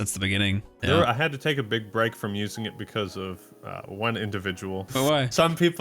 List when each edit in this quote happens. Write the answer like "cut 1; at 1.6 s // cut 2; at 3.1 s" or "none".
cut 1; at 0.8 s // cut 2; at 4.9 s